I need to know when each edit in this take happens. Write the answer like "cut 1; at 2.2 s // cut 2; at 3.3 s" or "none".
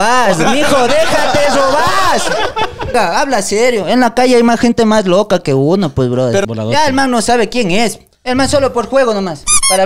cut 1; at 2.9 s // cut 2; at 6.5 s

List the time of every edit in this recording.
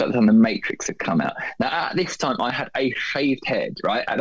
none

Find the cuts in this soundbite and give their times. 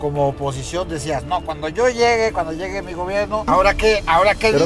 cut 1; at 3.5 s

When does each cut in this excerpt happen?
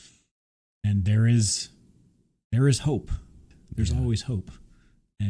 cut 1; at 3.5 s

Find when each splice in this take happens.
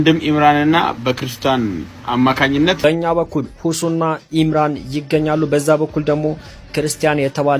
none

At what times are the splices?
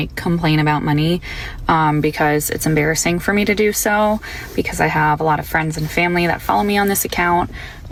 none

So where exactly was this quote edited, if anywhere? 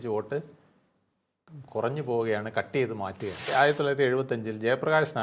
cut 1; at 3.5 s

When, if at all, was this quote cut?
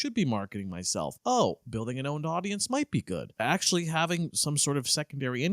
cut 1; at 1.1 s // cut 2; at 3.3 s

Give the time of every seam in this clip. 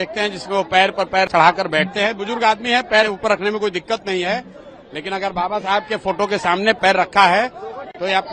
none

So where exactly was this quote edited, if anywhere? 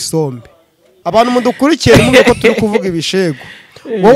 cut 1; at 0.9 s

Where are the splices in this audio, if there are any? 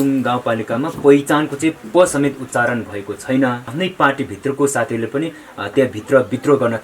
cut 1; at 3.7 s

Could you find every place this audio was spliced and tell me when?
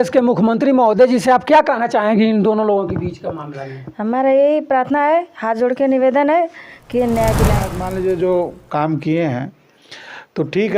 cut 1; at 7.8 s

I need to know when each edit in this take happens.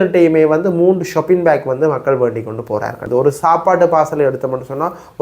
cut 1; at 3.0 s

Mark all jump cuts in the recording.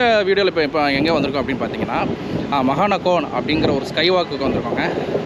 none

